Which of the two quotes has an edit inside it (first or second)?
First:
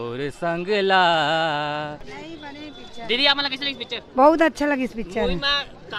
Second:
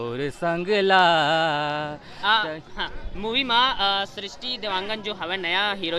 first